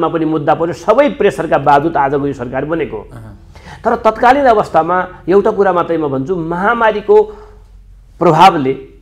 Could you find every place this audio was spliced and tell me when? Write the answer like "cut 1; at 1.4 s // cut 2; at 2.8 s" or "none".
none